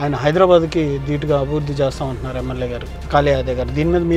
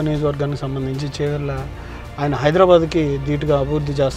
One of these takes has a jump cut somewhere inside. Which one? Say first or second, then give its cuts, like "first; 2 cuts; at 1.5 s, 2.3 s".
first; 1 cut; at 2.9 s